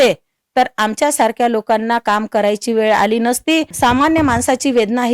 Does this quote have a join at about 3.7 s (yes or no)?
yes